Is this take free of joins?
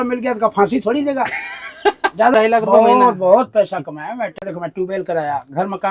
no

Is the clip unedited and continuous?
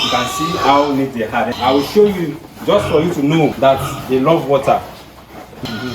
no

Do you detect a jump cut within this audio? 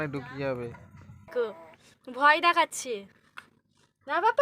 yes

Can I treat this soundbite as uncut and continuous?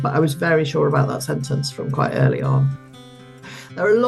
no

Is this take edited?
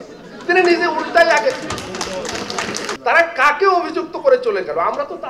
yes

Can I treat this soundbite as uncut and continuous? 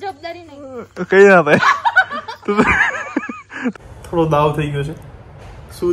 no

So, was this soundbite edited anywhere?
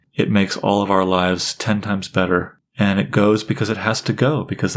yes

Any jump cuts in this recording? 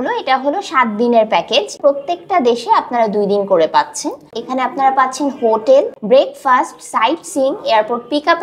yes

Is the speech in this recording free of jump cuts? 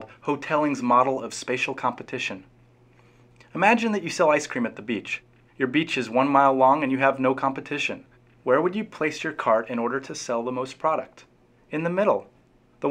yes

